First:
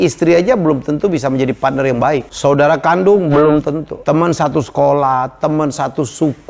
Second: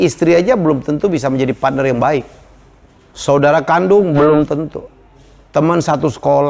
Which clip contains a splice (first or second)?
first